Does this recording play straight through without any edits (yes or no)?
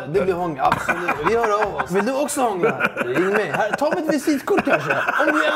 no